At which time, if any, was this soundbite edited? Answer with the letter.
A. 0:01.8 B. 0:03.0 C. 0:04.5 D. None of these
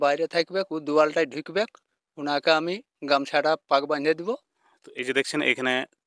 C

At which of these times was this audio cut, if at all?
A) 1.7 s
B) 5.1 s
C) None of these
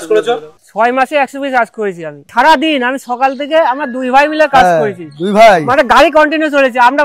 C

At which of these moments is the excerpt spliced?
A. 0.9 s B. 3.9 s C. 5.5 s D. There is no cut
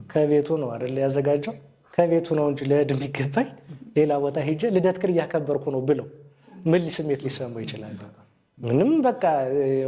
D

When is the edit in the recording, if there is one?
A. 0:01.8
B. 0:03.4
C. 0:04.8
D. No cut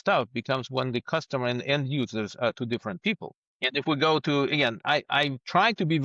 D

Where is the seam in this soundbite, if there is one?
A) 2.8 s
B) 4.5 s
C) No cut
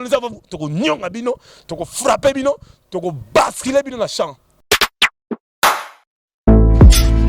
B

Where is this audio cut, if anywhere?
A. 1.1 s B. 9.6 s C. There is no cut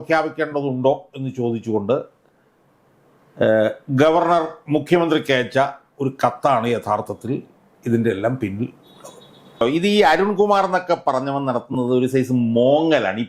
B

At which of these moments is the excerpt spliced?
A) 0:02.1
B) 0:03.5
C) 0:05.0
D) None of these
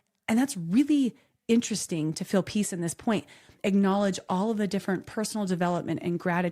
B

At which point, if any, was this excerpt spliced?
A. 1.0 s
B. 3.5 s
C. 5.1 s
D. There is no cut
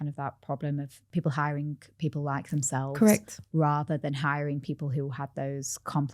A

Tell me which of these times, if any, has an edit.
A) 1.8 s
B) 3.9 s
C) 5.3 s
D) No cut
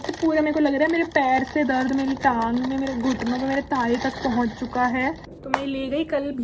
C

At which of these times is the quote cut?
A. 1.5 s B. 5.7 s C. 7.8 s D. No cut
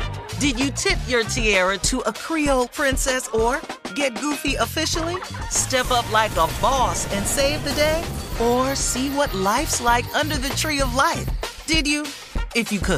D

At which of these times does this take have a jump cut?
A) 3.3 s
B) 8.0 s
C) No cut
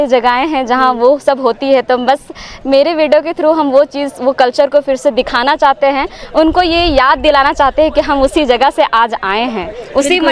C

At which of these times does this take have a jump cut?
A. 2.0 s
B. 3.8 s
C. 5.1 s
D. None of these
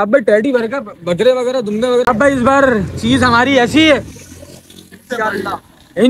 A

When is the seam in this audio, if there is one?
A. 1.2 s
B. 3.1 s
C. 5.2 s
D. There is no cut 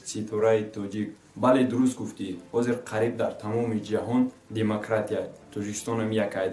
D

